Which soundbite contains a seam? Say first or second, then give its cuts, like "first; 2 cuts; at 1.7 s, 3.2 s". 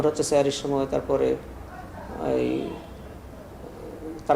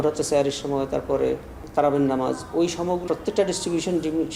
second; 2 cuts; at 1.5 s, 3.0 s